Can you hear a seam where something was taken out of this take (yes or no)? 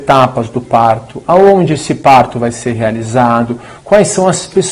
no